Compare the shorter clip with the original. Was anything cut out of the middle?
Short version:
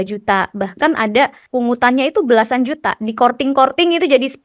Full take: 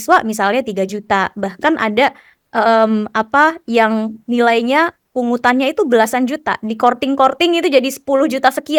yes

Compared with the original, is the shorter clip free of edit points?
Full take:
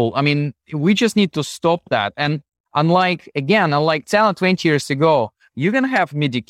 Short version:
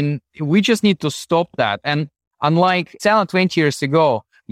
no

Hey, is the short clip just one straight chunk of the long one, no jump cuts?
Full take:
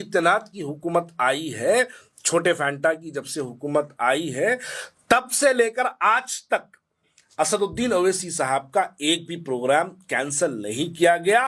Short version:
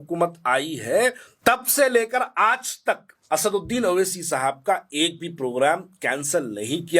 no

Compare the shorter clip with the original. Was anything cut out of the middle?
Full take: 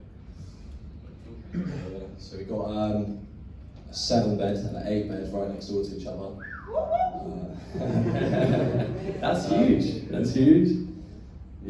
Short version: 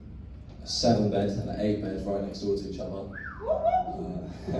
no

